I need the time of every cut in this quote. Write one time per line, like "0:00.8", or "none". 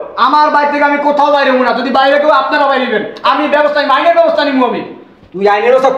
none